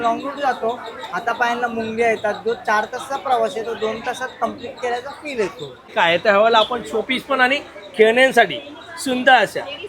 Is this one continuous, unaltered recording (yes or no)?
no